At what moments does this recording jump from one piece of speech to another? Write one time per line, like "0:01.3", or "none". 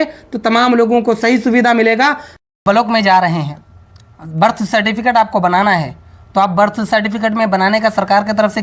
0:02.4